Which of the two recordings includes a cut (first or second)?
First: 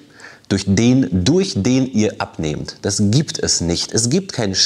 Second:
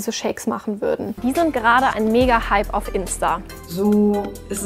second